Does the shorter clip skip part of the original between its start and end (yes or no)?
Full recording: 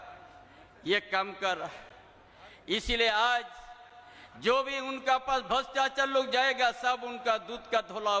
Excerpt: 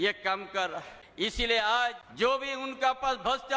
yes